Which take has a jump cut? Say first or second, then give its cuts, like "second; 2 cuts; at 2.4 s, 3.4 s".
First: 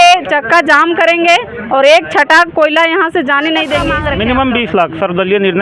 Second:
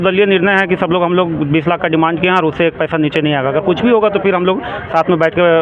first; 1 cut; at 3.9 s